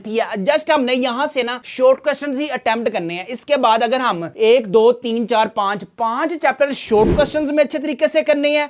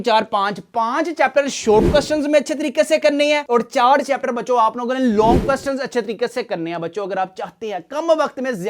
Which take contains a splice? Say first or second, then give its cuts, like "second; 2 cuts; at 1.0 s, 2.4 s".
first; 1 cut; at 4.3 s